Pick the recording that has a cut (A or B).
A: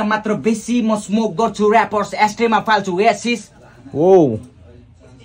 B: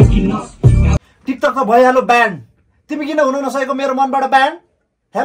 B